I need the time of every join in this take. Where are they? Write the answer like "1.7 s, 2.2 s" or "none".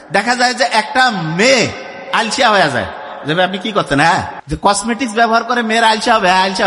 4.4 s